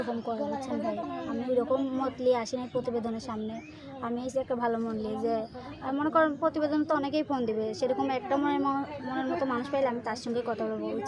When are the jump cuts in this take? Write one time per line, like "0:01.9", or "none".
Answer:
none